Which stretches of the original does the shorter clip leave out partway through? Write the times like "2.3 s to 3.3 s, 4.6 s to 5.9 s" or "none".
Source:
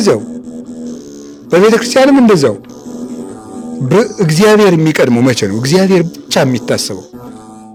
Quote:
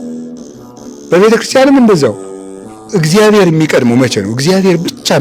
3.3 s to 4.1 s

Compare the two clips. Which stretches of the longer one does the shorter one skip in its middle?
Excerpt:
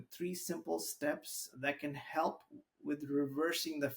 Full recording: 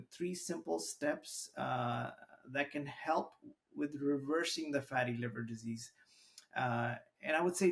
1.4 s to 2.3 s

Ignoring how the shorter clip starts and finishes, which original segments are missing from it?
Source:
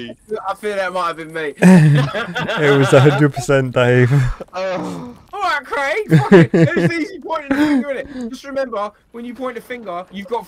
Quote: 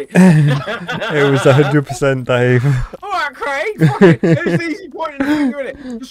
4.4 s to 5.2 s

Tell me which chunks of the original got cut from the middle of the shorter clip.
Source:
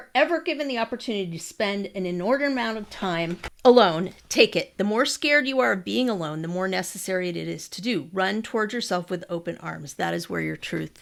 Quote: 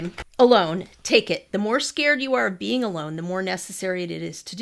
none

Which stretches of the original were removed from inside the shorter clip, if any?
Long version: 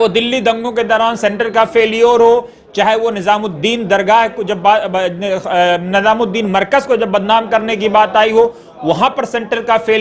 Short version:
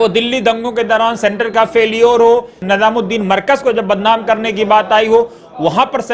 2.6 s to 5.8 s

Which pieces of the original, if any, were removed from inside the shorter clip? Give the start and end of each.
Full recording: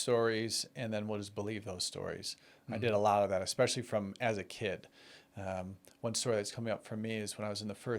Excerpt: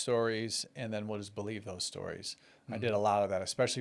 none

